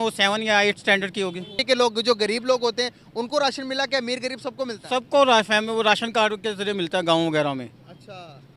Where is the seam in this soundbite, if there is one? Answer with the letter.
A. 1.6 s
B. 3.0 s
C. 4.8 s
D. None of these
A